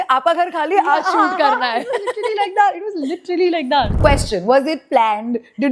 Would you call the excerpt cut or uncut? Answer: cut